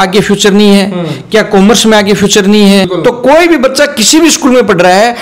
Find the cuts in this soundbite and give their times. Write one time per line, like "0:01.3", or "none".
0:02.9